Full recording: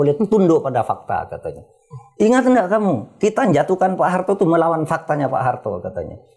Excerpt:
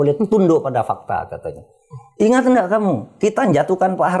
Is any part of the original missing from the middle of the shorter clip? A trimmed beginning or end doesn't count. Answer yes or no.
no